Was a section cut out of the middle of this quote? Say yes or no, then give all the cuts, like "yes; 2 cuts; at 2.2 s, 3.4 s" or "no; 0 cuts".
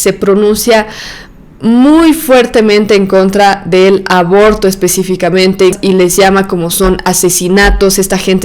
yes; 1 cut; at 5.8 s